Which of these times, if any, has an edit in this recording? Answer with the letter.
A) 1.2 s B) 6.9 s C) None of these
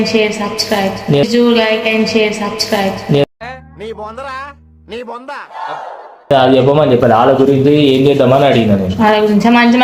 C